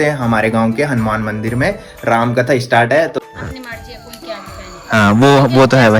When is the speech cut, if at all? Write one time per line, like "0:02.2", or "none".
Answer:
0:03.2